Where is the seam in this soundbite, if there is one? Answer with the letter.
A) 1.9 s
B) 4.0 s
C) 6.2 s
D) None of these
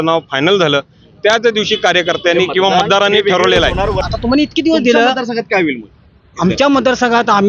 B